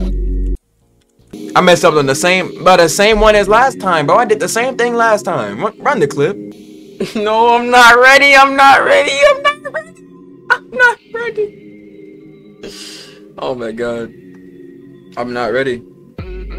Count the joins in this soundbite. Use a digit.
2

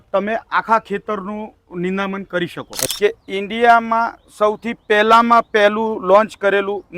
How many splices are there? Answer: 1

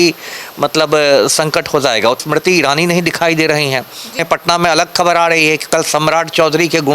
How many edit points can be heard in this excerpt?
2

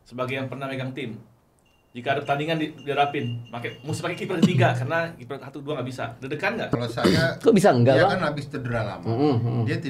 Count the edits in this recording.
1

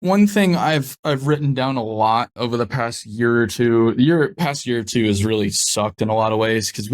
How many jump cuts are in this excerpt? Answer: 1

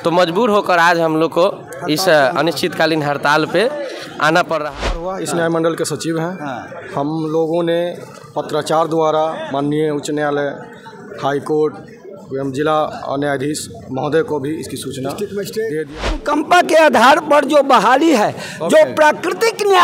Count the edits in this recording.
2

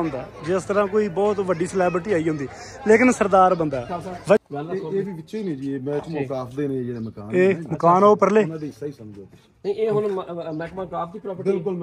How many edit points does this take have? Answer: 1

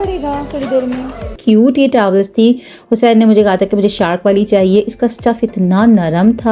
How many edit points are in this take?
1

